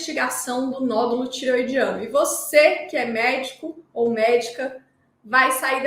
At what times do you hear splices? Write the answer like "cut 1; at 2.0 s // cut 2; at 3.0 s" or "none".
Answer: none